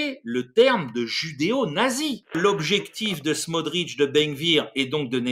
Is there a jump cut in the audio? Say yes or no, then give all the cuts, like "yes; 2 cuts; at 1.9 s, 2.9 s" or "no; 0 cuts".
yes; 1 cut; at 2.4 s